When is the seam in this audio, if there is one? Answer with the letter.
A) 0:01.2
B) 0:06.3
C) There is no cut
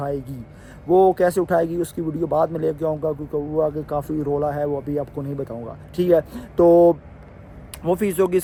C